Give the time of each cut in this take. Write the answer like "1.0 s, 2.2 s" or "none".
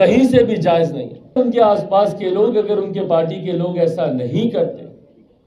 1.4 s